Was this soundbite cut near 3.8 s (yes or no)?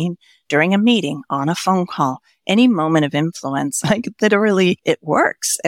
yes